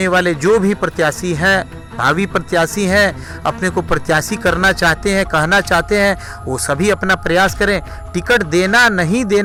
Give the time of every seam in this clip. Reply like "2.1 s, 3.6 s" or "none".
none